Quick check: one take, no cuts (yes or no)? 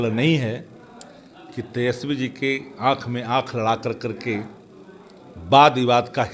yes